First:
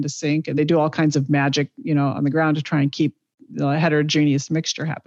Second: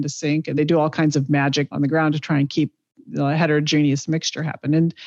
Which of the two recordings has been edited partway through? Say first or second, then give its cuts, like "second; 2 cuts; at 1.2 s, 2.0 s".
second; 1 cut; at 1.7 s